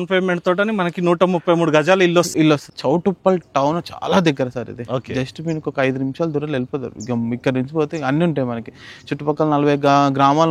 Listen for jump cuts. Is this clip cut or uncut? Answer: cut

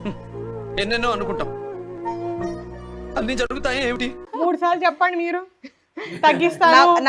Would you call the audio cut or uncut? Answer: cut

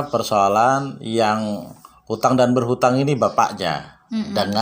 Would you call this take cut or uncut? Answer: uncut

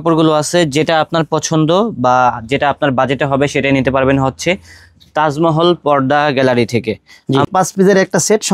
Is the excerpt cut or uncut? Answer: cut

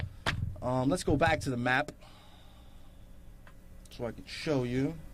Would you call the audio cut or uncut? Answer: uncut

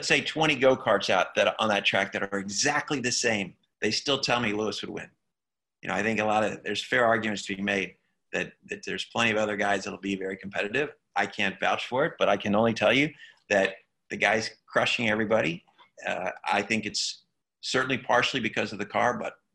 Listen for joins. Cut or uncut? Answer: uncut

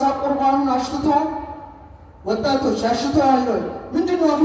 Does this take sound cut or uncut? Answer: uncut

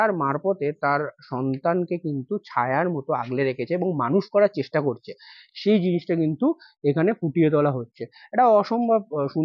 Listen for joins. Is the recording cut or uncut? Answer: uncut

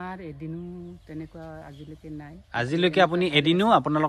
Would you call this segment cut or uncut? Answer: uncut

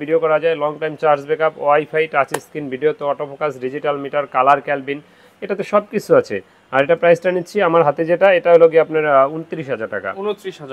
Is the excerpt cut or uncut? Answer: uncut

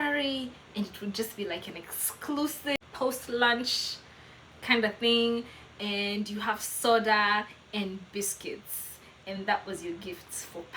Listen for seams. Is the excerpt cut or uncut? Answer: cut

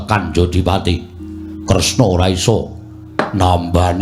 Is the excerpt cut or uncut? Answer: uncut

